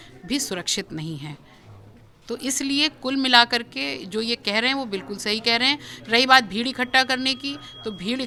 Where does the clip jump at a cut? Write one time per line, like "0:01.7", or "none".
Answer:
none